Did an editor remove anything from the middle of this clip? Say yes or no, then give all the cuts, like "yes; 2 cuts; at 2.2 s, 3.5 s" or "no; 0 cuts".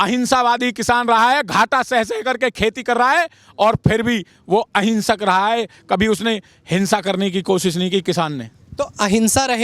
no; 0 cuts